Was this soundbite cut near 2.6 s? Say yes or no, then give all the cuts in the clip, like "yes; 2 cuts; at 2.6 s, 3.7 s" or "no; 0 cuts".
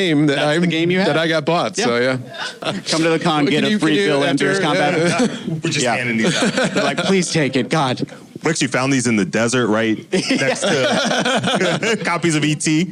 yes; 1 cut; at 2.6 s